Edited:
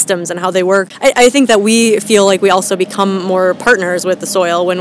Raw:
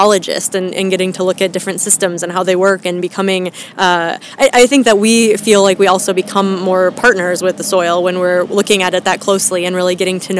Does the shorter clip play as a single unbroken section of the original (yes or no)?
no